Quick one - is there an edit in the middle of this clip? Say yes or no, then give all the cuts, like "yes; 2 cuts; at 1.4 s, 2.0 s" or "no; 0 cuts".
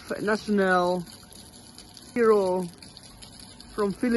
yes; 1 cut; at 2.2 s